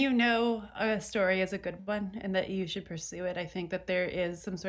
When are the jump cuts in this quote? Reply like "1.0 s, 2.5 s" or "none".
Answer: none